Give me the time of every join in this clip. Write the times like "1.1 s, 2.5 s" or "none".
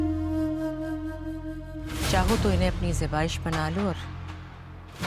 none